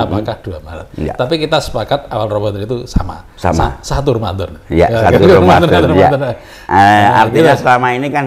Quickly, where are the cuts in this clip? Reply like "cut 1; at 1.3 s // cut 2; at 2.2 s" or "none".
none